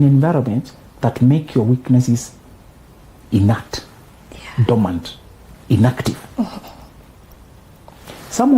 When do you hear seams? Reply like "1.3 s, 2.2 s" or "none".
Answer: none